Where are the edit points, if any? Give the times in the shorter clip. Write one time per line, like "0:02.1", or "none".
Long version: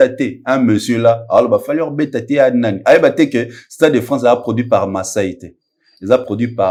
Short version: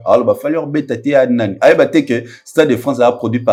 none